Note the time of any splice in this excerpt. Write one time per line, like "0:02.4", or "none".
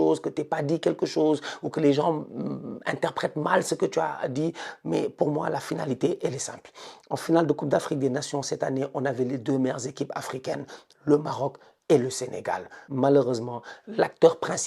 0:12.8